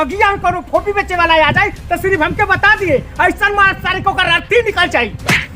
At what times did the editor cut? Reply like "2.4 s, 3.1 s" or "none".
none

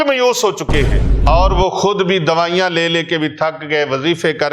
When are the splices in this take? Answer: 1.0 s

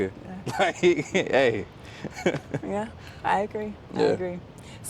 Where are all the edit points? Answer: none

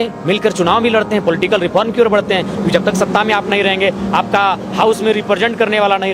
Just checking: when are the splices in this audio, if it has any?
none

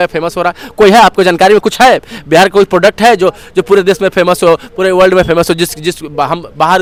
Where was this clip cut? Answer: none

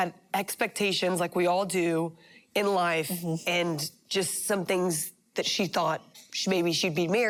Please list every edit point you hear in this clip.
none

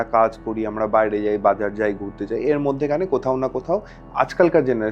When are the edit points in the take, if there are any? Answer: none

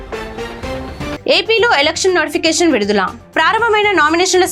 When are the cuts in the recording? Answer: none

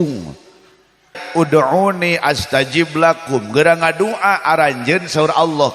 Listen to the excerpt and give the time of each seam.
1.2 s

